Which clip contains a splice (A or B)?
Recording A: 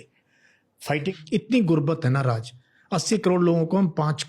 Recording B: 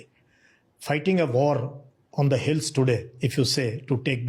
A